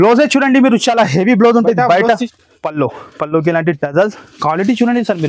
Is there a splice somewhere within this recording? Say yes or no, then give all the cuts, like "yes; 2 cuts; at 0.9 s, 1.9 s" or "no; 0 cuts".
yes; 1 cut; at 2.3 s